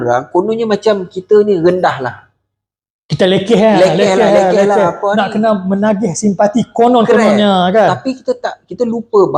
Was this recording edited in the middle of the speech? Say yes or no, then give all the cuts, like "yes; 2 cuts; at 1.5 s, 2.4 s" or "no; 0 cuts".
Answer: no; 0 cuts